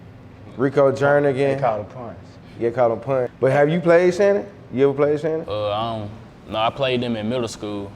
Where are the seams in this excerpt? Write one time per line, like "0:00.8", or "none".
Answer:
0:03.3